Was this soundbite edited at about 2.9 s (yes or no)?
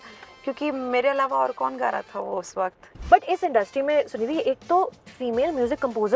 yes